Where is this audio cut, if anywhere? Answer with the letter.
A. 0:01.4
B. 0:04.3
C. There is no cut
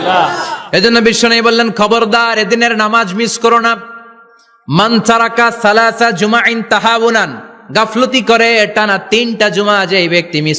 C